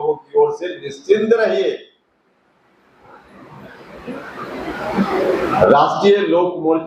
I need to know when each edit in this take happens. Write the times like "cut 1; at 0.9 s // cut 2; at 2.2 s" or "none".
none